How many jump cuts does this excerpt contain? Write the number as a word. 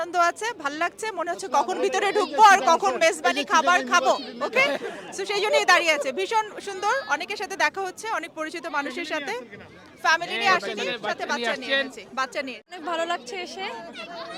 zero